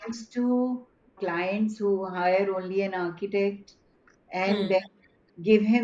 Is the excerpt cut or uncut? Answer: cut